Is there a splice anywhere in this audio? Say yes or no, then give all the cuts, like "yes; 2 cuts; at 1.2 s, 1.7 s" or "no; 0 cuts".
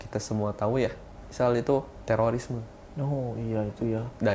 yes; 1 cut; at 1.9 s